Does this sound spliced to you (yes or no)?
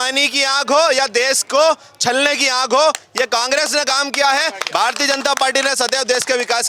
no